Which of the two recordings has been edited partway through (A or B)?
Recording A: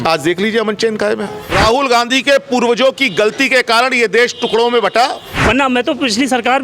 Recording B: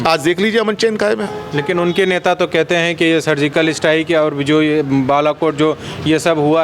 A